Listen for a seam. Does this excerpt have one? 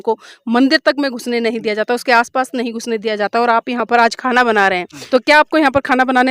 yes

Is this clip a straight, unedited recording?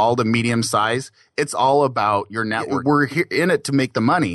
no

